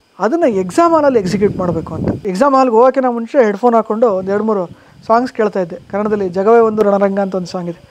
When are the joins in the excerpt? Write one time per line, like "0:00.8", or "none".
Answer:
0:02.2
0:05.8